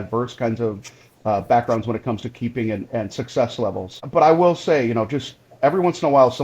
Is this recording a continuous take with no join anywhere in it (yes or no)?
no